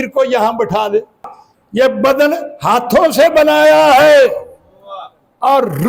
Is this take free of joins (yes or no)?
no